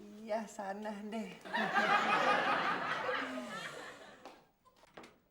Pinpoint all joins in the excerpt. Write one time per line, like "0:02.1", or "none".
0:04.1